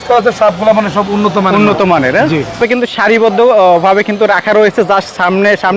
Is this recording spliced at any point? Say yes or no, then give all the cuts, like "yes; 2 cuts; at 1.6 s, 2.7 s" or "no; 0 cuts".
yes; 1 cut; at 2.6 s